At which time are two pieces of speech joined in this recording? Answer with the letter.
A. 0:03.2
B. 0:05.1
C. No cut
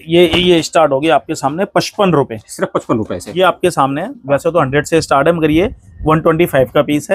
A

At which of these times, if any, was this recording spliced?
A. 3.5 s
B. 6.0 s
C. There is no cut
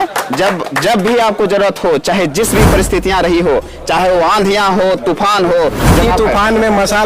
B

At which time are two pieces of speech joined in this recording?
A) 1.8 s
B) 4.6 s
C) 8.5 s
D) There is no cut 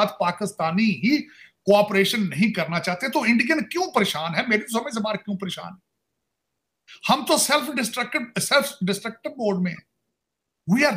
D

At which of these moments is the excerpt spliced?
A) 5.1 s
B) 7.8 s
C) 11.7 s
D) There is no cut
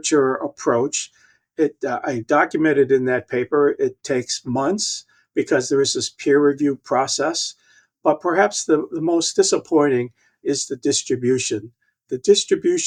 D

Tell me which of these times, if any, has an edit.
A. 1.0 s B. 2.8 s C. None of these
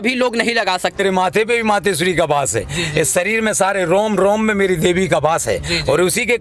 A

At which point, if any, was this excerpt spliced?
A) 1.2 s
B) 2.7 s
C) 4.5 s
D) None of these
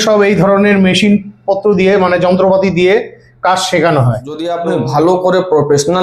C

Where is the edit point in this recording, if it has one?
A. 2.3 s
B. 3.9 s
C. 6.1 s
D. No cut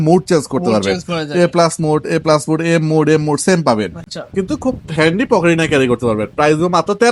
D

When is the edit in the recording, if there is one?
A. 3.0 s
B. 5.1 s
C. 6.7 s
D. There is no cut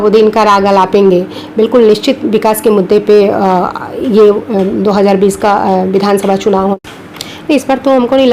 C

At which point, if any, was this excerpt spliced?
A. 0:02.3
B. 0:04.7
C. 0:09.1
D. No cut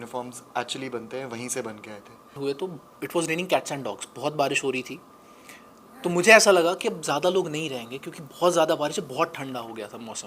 A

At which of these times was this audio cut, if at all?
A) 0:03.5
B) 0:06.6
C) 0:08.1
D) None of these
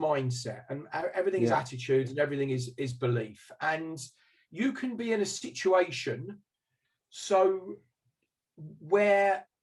D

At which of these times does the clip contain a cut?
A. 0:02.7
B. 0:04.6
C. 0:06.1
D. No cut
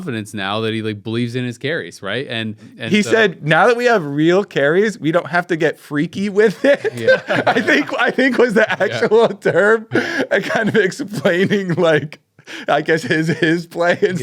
A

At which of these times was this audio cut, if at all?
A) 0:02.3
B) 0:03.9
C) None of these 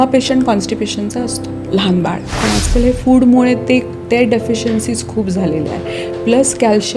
A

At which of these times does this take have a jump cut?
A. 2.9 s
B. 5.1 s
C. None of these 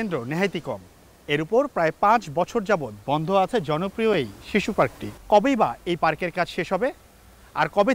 B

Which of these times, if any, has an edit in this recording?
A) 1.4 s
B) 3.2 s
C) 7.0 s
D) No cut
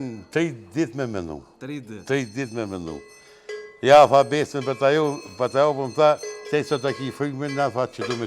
D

